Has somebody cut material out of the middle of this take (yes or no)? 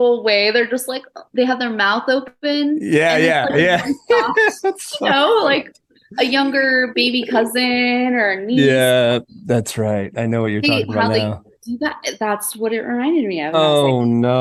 no